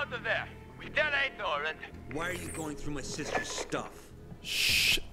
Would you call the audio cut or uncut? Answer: uncut